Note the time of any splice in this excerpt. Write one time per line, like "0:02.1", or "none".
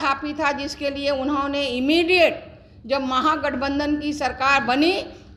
none